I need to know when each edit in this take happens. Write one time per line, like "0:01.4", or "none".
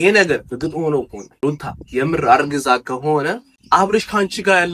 0:01.2
0:03.5